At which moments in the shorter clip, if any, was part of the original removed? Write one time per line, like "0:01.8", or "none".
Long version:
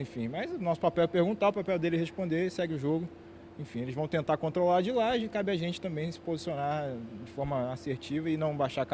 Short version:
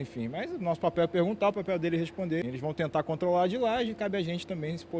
0:02.4